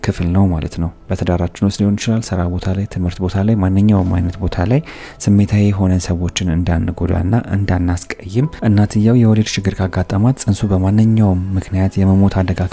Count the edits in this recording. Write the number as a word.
two